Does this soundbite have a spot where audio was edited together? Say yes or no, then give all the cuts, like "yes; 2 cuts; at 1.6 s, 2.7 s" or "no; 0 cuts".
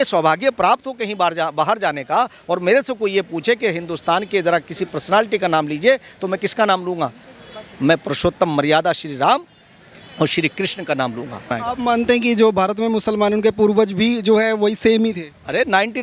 yes; 1 cut; at 11.5 s